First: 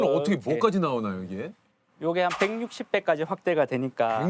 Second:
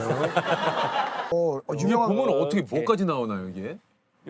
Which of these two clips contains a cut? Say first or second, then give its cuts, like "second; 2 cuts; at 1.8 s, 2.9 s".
second; 1 cut; at 1.3 s